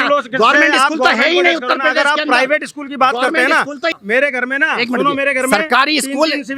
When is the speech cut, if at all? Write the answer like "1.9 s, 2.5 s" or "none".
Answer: 3.9 s